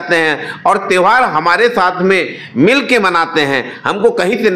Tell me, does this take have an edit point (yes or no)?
no